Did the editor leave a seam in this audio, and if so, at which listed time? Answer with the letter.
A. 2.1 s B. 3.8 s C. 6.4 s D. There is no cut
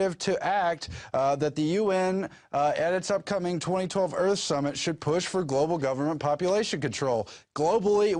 D